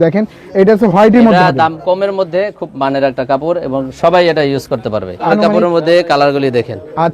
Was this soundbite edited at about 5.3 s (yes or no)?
yes